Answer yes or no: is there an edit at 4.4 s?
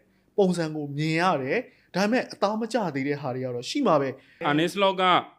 yes